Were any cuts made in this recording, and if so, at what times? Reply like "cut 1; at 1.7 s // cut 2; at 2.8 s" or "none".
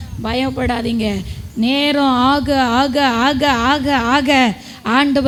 none

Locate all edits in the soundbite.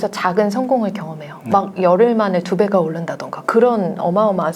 none

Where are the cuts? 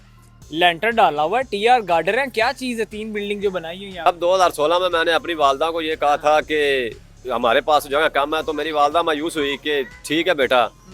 cut 1; at 4.0 s

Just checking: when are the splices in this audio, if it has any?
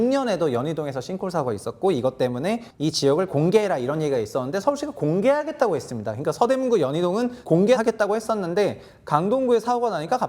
cut 1; at 2.7 s // cut 2; at 7.6 s

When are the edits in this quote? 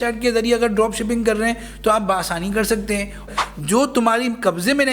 cut 1; at 3.2 s

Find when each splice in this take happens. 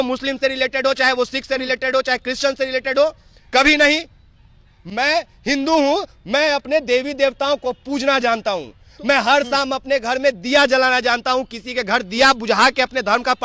none

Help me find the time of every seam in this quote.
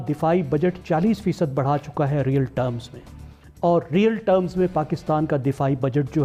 none

